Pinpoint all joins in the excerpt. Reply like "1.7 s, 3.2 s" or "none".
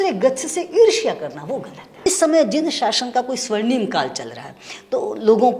1.8 s